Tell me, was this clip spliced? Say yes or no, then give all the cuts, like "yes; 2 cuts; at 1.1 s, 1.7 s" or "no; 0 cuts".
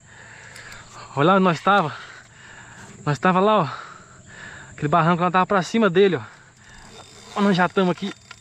no; 0 cuts